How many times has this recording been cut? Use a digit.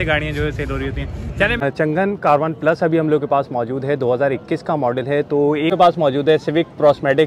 2